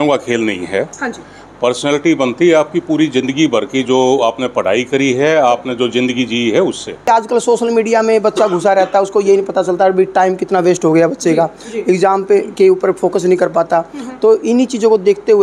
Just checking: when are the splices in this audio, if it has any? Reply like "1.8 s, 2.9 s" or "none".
7.0 s